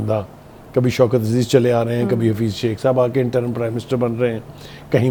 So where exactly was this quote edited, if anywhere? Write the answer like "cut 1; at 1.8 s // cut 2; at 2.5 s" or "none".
none